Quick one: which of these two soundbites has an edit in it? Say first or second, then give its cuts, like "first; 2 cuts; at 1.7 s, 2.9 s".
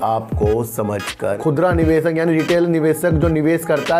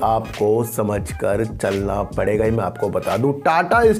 first; 1 cut; at 1.4 s